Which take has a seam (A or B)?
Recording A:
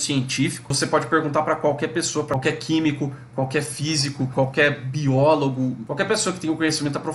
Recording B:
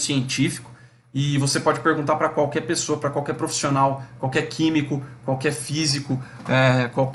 A